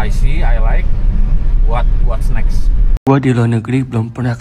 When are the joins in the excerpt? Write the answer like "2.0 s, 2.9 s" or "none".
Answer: 2.9 s